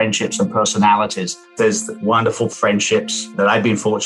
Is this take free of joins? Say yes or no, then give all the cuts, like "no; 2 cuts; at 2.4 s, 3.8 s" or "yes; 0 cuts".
no; 2 cuts; at 1.5 s, 2.5 s